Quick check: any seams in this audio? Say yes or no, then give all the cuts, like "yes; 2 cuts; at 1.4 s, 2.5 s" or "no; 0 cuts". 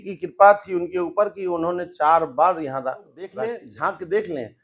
yes; 1 cut; at 3.3 s